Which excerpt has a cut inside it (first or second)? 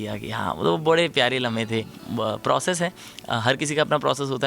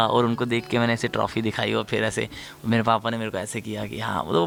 first